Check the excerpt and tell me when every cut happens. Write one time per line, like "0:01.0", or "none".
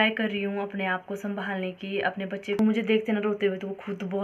0:02.6